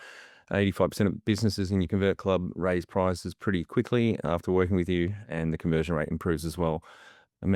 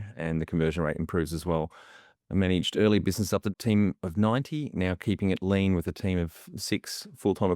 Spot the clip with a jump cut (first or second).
second